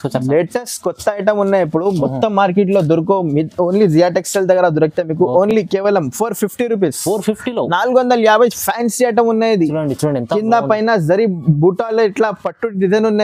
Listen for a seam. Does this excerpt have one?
no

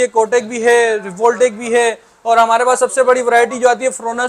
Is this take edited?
no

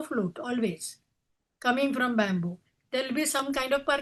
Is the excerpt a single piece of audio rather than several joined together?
yes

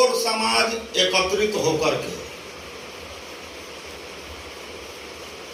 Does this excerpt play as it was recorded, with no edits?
yes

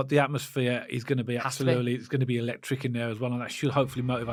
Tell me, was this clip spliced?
no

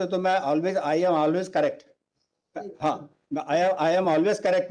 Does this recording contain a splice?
no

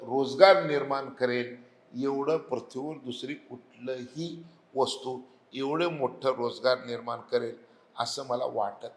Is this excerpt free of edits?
yes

